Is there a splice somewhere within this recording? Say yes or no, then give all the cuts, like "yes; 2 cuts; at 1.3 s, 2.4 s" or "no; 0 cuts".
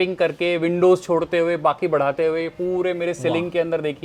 no; 0 cuts